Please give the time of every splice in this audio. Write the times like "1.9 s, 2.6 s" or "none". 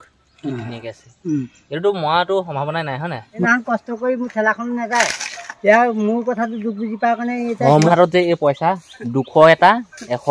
3.4 s, 7.9 s